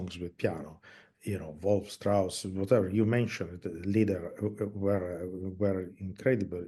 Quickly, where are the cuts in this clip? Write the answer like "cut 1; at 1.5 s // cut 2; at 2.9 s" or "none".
none